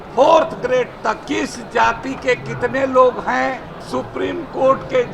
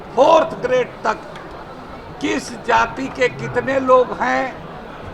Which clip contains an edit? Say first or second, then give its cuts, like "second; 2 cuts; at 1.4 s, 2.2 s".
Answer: first; 2 cuts; at 1.2 s, 3.7 s